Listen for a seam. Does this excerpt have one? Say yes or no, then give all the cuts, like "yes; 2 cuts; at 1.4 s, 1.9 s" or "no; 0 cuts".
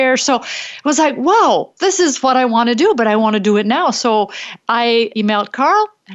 yes; 1 cut; at 5.1 s